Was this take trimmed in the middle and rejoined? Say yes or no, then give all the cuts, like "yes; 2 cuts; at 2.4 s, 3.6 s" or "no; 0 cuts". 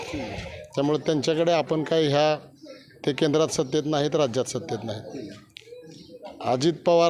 no; 0 cuts